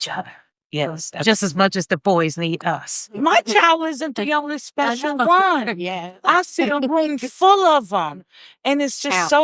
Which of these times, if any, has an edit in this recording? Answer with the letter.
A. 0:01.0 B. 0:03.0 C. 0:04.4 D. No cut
B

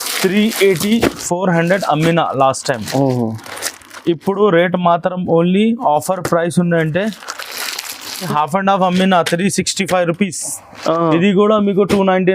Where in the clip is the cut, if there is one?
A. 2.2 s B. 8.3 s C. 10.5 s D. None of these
B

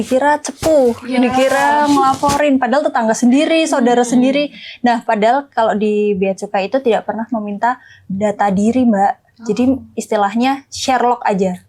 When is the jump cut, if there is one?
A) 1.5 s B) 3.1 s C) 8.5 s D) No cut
D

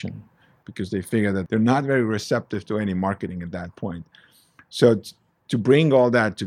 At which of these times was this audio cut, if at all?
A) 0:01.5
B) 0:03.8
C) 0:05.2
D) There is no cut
A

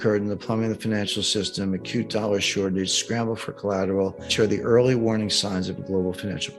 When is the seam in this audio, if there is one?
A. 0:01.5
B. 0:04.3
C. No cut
B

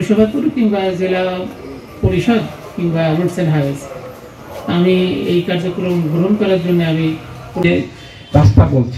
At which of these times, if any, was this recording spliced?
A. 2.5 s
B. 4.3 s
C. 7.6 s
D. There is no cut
C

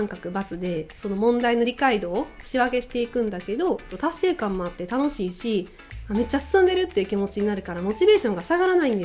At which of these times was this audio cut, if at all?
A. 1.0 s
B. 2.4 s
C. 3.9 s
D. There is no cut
C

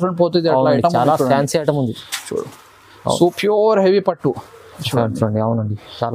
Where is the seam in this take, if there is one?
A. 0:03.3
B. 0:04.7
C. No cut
A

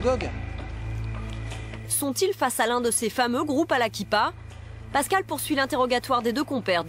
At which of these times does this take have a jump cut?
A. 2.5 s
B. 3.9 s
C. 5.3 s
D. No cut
A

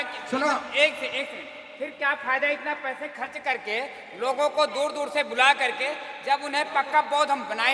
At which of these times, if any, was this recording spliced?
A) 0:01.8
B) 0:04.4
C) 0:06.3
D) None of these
D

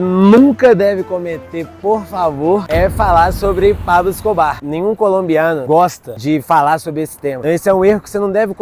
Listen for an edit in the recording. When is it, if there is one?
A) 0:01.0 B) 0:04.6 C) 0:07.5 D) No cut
B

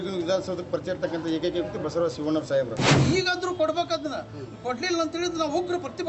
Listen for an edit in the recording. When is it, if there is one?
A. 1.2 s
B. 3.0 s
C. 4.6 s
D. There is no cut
B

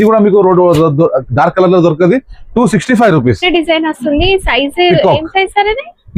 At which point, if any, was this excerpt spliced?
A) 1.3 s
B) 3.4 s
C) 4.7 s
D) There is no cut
B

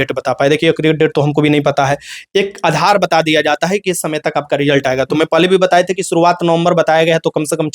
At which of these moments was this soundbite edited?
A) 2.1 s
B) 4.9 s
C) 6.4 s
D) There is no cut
D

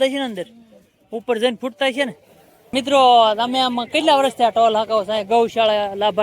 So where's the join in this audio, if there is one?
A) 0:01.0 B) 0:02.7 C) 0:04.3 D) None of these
B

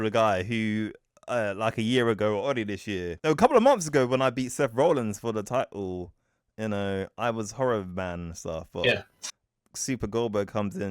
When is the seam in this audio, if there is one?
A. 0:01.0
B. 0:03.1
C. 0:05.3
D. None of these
B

